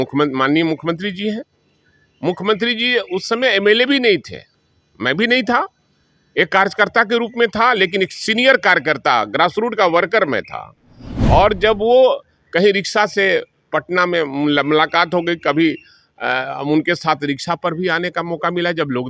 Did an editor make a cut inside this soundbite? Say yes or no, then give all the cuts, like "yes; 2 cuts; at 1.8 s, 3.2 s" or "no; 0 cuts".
no; 0 cuts